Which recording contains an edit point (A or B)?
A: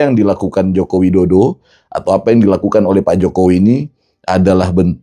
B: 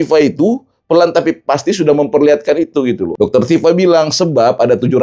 B